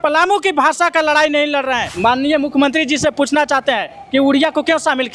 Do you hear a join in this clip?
yes; 1 cut; at 1.9 s

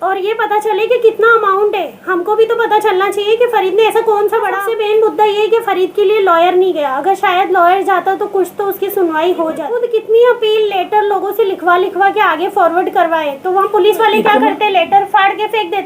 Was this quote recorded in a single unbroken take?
no; 2 cuts; at 4.7 s, 9.8 s

